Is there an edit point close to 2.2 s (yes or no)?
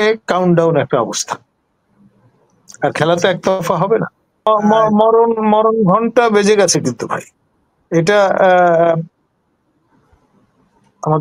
no